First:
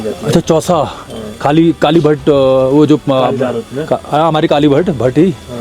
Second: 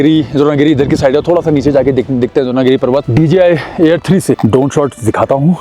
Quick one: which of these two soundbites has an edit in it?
second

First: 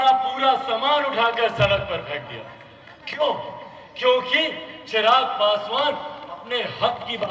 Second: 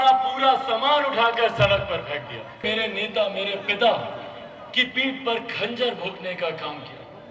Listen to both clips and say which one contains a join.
second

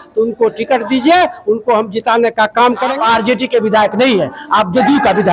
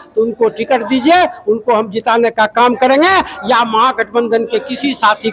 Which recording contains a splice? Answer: first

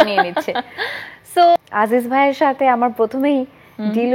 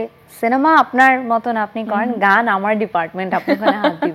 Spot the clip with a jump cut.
first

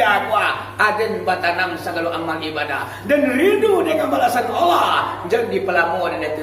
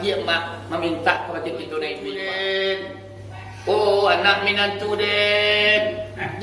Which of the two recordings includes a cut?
second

